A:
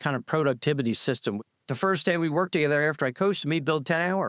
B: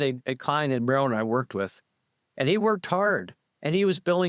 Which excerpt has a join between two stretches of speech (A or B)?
A